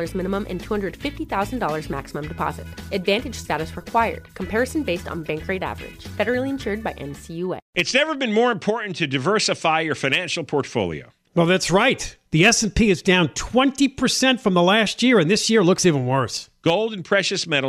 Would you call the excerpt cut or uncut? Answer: cut